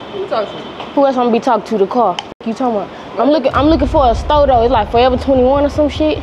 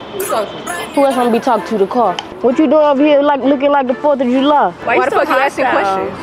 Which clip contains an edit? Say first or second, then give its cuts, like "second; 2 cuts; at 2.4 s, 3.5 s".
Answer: second; 2 cuts; at 2.3 s, 4.8 s